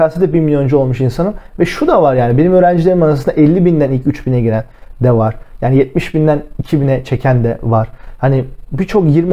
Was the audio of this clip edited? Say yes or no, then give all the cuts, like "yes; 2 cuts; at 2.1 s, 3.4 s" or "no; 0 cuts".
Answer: no; 0 cuts